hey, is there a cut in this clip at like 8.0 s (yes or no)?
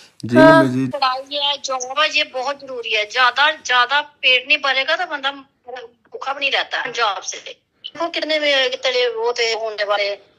yes